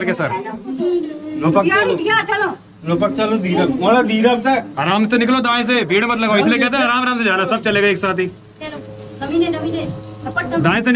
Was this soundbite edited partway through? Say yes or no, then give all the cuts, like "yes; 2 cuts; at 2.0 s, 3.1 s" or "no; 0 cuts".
no; 0 cuts